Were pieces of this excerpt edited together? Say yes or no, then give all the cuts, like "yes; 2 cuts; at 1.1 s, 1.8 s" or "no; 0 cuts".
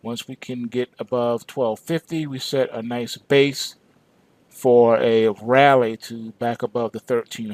no; 0 cuts